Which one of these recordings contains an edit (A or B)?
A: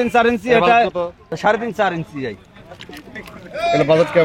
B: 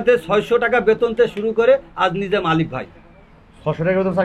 A